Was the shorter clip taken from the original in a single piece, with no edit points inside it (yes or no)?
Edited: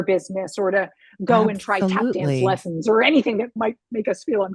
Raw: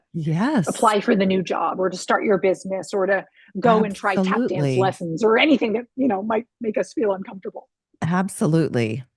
no